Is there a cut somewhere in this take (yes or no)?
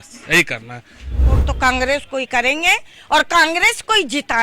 yes